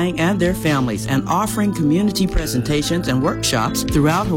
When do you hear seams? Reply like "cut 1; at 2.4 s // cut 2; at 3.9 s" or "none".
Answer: none

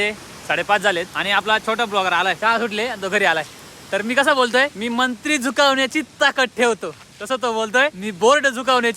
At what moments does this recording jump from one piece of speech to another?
cut 1; at 1.1 s // cut 2; at 2.4 s // cut 3; at 4.8 s // cut 4; at 8.0 s

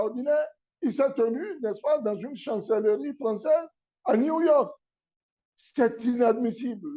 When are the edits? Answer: none

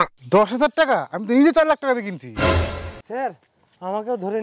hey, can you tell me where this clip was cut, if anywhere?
cut 1; at 3.0 s

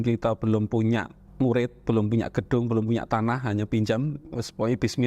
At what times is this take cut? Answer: cut 1; at 1.2 s

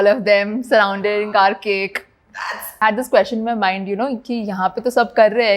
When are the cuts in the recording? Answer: cut 1; at 2.8 s

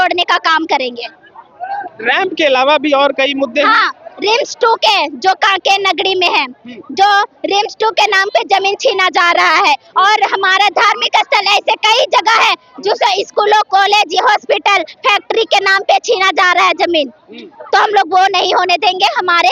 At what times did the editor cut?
none

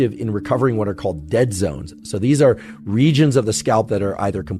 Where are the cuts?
none

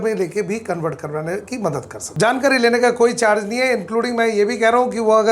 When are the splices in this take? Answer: cut 1; at 2.0 s

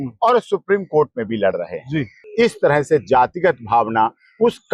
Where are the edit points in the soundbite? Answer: cut 1; at 2.2 s

